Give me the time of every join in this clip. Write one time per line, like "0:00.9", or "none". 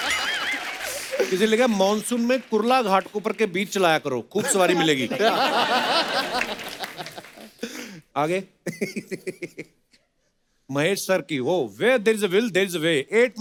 none